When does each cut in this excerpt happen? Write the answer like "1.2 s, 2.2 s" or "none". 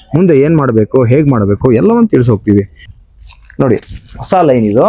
2.8 s